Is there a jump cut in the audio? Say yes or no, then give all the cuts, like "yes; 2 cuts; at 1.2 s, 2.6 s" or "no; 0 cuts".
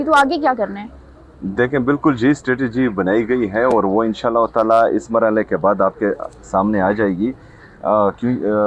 no; 0 cuts